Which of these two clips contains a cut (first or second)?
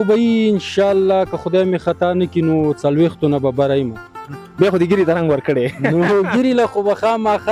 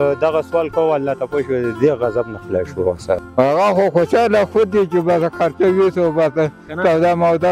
second